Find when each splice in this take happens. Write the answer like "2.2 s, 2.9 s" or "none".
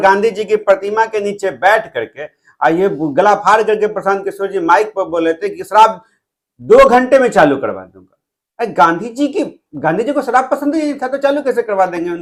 none